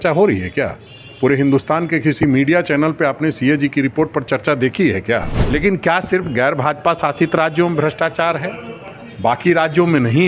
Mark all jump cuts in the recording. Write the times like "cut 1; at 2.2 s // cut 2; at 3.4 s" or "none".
cut 1; at 5.4 s